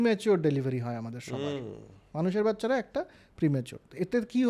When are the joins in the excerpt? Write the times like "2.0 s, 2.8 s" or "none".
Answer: none